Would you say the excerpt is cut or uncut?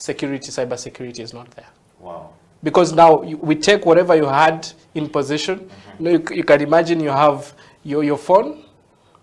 uncut